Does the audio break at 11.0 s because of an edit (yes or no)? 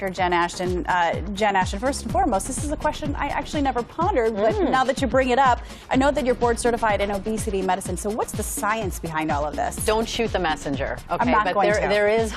yes